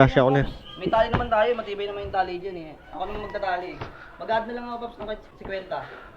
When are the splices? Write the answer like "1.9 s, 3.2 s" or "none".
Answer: 3.0 s, 5.3 s